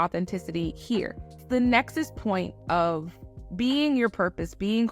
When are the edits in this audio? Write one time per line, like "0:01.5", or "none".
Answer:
0:01.4